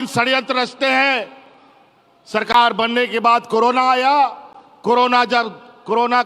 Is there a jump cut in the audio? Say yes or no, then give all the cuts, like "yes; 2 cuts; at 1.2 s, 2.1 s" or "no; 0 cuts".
no; 0 cuts